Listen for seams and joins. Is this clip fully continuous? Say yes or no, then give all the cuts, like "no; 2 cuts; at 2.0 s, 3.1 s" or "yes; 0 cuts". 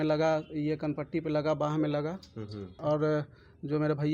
no; 1 cut; at 2.8 s